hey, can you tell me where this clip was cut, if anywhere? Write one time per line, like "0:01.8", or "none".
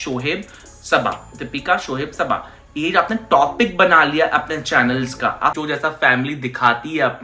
0:05.6